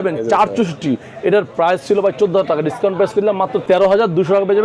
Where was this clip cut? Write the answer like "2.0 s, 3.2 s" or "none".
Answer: 3.6 s

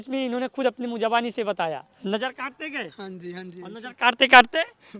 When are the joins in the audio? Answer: 1.9 s

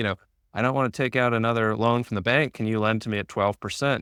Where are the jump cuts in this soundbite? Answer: none

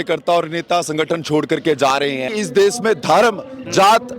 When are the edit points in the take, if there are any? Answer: 2.3 s

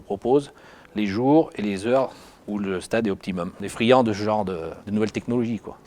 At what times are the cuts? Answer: 3.6 s

